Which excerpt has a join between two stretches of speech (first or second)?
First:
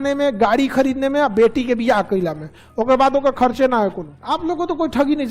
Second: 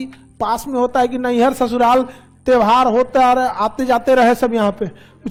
first